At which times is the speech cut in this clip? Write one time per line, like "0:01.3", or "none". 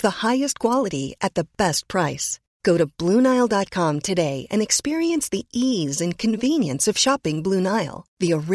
none